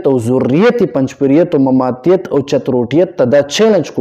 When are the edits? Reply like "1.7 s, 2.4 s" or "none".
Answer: none